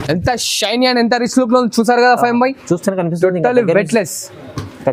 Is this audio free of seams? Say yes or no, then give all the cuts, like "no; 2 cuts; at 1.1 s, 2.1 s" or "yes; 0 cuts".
yes; 0 cuts